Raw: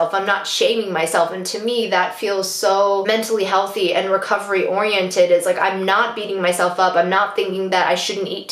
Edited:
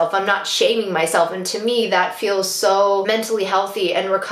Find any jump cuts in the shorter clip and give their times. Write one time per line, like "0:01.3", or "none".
none